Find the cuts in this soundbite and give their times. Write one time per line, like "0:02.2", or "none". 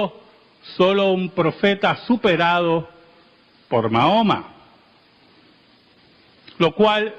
0:04.2